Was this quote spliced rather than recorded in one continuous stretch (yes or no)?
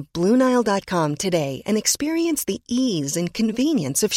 no